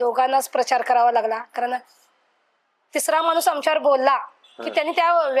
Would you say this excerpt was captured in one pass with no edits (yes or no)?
yes